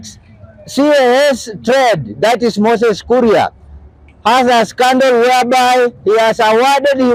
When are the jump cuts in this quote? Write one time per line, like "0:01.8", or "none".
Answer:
none